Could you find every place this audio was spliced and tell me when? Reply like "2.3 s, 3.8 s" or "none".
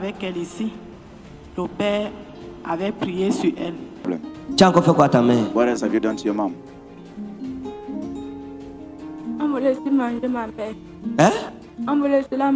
none